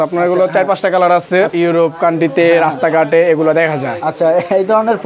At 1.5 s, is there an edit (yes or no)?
yes